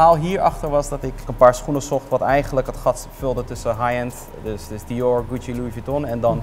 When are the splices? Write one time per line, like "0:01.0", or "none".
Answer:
none